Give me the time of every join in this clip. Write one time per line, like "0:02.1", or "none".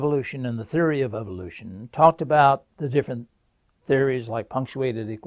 0:03.4

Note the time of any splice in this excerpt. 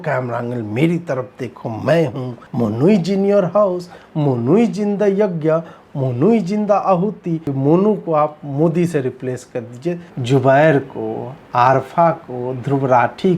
0:02.4
0:07.5
0:10.1

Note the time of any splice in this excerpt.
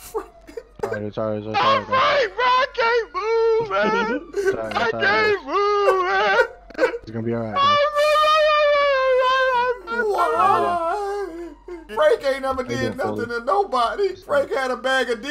0:11.9
0:14.2

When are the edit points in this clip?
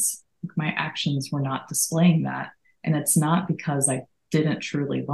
none

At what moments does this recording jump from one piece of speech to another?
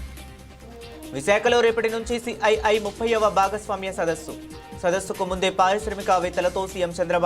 0:01.1

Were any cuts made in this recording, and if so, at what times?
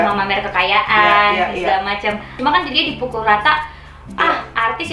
0:02.4

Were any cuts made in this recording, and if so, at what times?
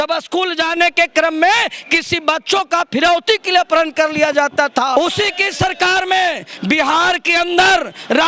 0:04.9

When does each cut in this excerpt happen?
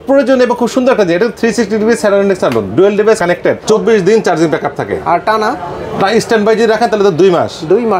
0:03.6

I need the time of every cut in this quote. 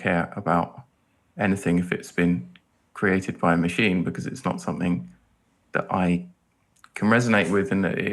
none

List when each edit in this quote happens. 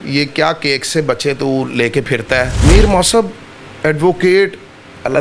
0:02.5

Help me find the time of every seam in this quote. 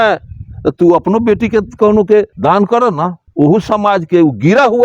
0:02.3

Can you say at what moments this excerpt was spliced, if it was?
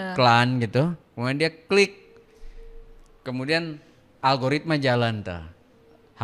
none

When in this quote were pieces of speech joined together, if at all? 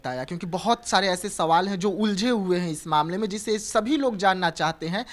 none

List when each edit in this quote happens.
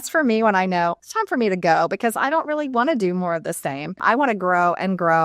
0:01.1
0:03.9

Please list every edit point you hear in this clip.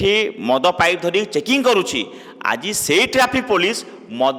none

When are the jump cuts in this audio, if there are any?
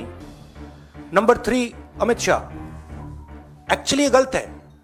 none

